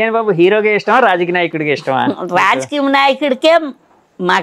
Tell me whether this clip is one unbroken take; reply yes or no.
yes